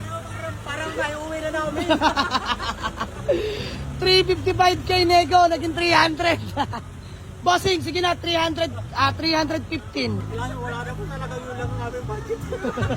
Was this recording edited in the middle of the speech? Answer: yes; 1 cut; at 10.2 s

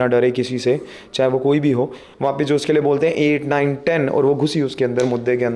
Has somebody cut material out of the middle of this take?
yes; 1 cut; at 2.0 s

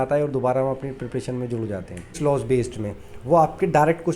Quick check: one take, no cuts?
no; 1 cut; at 2.2 s

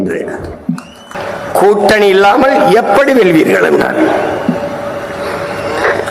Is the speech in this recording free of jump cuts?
no; 1 cut; at 1.0 s

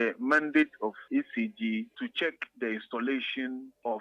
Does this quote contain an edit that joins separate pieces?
yes; 1 cut; at 1.0 s

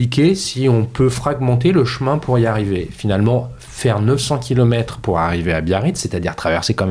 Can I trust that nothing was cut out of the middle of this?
yes; 0 cuts

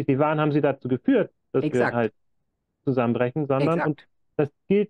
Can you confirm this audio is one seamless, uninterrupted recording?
yes; 0 cuts

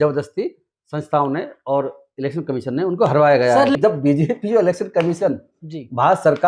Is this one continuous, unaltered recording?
no; 1 cut; at 3.7 s

